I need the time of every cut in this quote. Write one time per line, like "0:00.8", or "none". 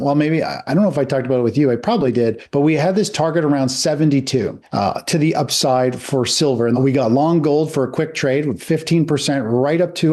0:02.4
0:06.8